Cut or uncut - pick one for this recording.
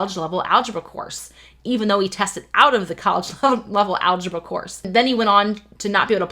cut